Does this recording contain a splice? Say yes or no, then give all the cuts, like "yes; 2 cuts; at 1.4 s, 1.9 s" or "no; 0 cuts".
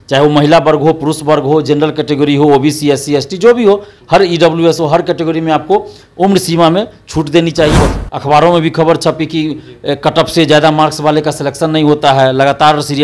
yes; 1 cut; at 7.7 s